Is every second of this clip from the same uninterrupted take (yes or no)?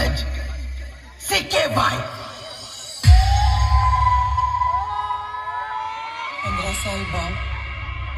yes